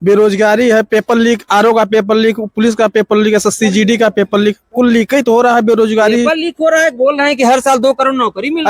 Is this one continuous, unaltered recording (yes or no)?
yes